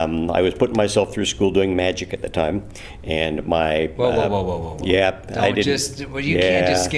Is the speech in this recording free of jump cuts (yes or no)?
no